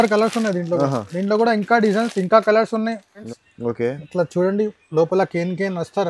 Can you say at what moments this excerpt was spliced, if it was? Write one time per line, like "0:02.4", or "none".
0:03.3

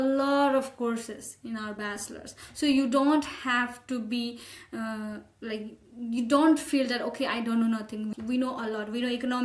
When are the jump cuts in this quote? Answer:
none

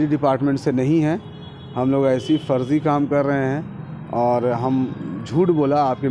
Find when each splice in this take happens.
none

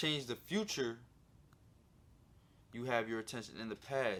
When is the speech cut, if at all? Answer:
none

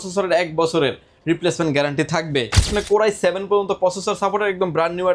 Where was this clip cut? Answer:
0:02.7

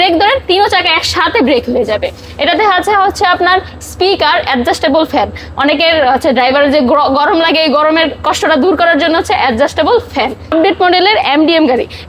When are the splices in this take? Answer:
0:10.5

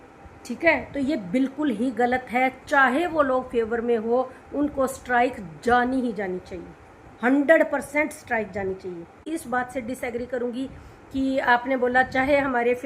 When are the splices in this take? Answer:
0:09.3

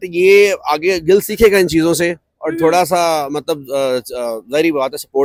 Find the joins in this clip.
none

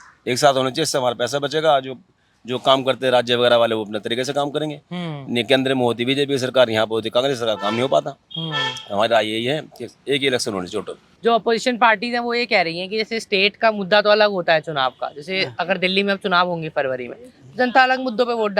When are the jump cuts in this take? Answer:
0:11.1

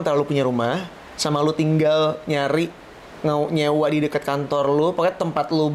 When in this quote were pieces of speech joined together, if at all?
none

